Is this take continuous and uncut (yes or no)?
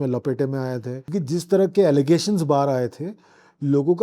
no